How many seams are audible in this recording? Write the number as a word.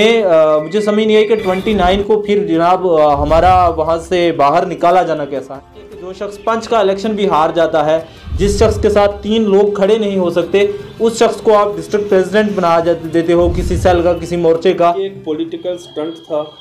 two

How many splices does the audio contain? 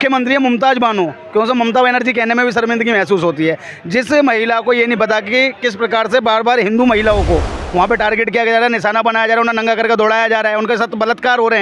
zero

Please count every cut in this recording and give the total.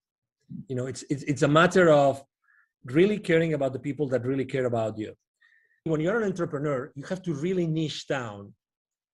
one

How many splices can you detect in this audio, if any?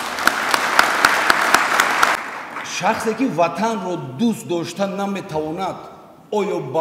one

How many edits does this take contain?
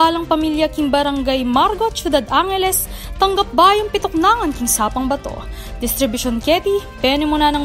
zero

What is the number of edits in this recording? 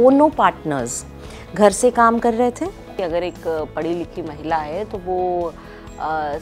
one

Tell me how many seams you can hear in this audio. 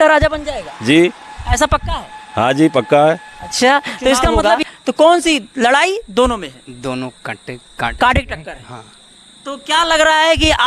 one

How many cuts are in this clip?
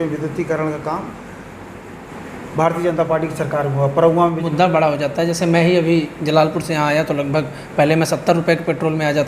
one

